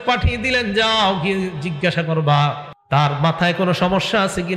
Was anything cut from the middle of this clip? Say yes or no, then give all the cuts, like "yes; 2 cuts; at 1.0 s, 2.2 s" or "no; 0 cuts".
yes; 1 cut; at 2.7 s